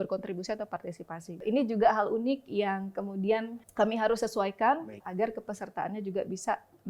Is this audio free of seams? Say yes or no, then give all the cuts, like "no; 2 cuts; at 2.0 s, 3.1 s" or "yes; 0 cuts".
no; 3 cuts; at 1.4 s, 3.6 s, 5.0 s